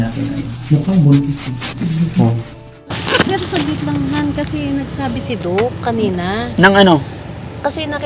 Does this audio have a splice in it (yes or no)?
yes